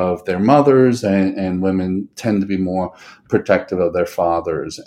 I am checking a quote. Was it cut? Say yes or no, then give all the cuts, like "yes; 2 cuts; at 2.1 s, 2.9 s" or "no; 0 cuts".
no; 0 cuts